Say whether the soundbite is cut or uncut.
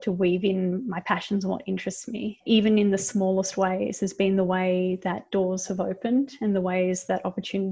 uncut